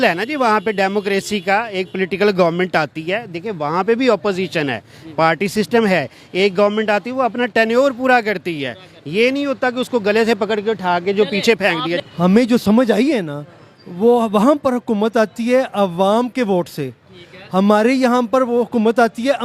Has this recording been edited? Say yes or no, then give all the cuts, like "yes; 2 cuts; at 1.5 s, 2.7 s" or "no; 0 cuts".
yes; 1 cut; at 12.0 s